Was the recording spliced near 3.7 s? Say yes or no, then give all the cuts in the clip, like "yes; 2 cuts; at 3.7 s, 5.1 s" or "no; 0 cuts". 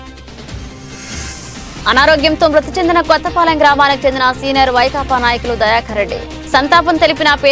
no; 1 cut; at 1.1 s